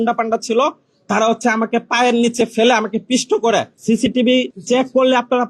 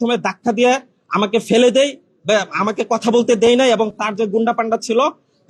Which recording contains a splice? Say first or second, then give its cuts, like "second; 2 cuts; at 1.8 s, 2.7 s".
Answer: first; 2 cuts; at 3.7 s, 4.6 s